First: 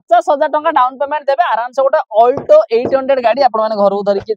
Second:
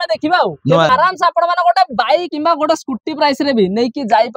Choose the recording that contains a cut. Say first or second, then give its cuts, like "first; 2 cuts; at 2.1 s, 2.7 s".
second; 2 cuts; at 0.9 s, 2.3 s